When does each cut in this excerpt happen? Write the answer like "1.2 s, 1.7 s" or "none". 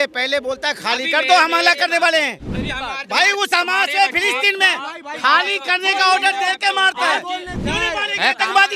7.5 s